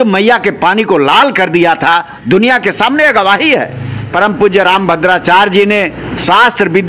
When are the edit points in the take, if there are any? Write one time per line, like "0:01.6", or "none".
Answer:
0:04.0